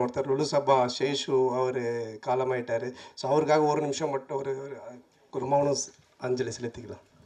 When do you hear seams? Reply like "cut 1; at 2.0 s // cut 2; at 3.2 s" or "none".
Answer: none